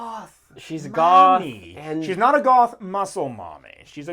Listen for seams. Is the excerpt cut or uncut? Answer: uncut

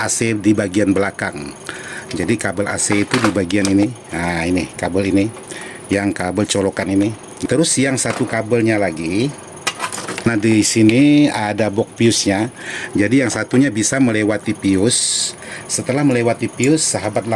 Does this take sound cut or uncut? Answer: cut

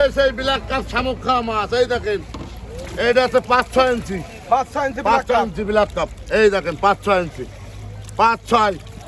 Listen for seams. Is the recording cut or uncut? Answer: uncut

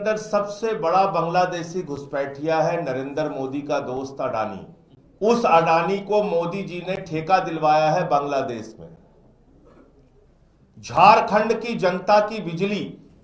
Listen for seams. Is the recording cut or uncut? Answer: uncut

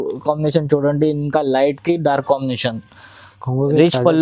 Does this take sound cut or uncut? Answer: uncut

